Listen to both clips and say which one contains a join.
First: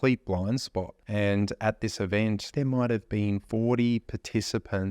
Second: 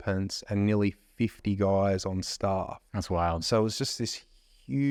first; 3 cuts; at 1.0 s, 2.5 s, 3.4 s

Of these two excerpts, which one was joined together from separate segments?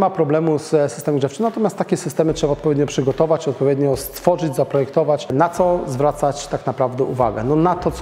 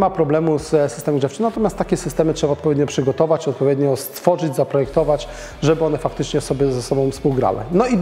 first; 1 cut; at 5.3 s

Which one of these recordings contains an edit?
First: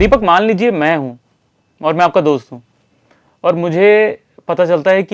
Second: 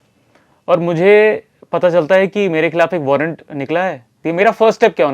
second; 1 cut; at 4.2 s

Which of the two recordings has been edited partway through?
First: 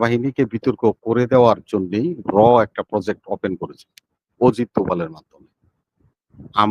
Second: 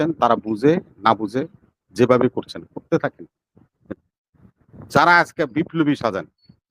second; 1 cut; at 3.9 s

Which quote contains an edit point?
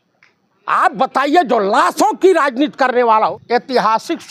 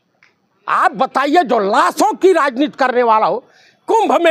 first; 1 cut; at 3.4 s

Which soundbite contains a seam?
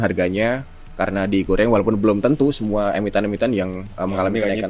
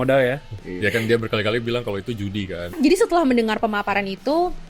second; 1 cut; at 2.8 s

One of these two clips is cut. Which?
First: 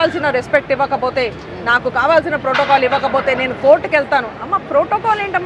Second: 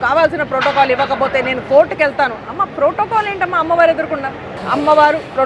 second; 1 cut; at 4.5 s

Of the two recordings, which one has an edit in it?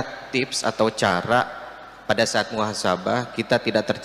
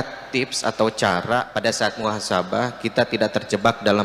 second; 1 cut; at 1.5 s

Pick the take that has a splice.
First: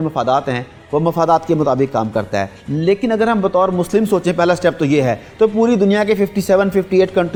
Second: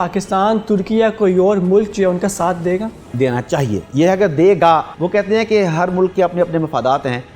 second; 3 cuts; at 3.0 s, 3.9 s, 4.9 s

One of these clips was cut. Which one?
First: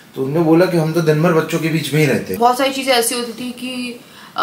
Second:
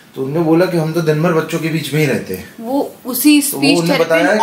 first; 1 cut; at 2.3 s

